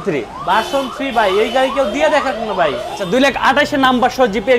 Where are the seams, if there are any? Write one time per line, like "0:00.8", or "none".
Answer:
0:02.9

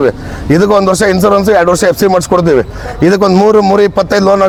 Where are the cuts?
none

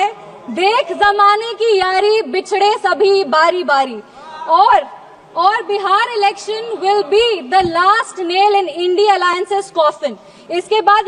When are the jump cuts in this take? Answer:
none

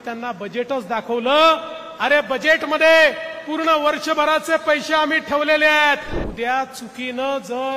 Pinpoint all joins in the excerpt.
0:06.1

